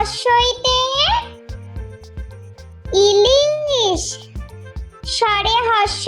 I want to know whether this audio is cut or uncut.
cut